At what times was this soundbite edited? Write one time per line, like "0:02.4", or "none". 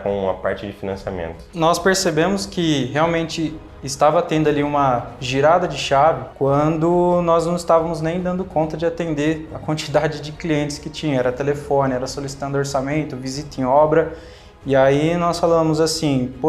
0:01.4
0:06.3